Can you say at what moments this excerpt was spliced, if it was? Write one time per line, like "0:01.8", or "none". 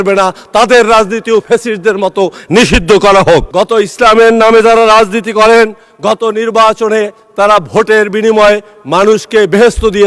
0:03.5